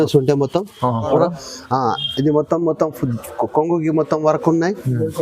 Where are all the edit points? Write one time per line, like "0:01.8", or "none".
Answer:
0:01.1

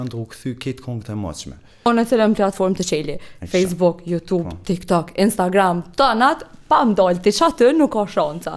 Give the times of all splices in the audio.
0:01.9

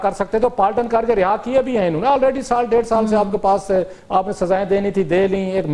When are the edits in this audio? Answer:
none

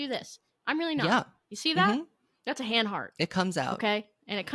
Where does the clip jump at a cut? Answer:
none

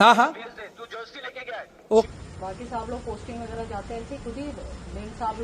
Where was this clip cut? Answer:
0:02.1

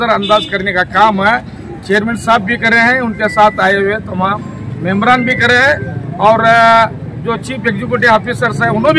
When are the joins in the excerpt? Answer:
none

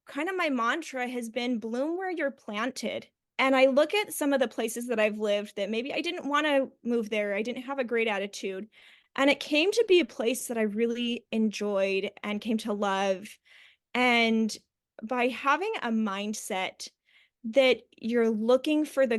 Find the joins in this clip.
0:03.2

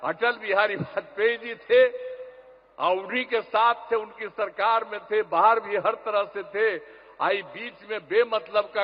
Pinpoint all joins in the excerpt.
none

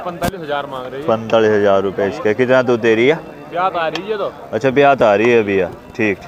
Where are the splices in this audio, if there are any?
none

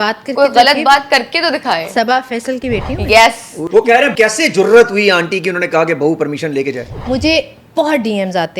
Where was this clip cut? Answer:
0:04.0
0:06.9

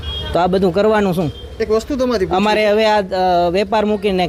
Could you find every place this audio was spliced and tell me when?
none

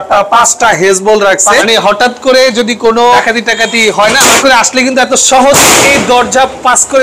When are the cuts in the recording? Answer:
0:01.6
0:03.2
0:04.4

